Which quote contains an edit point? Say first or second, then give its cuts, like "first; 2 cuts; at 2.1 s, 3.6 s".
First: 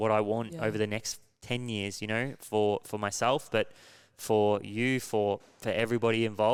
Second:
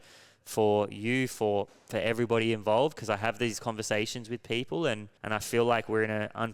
second; 1 cut; at 5.1 s